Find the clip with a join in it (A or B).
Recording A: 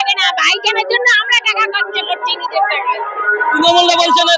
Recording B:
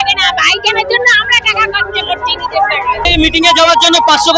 B